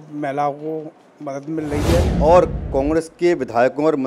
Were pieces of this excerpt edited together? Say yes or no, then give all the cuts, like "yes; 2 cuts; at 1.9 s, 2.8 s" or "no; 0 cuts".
yes; 1 cut; at 2.1 s